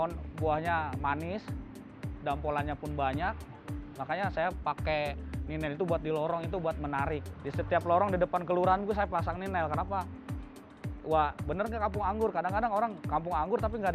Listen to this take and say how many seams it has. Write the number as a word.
one